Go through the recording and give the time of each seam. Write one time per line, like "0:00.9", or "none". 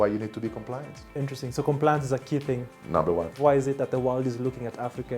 0:03.3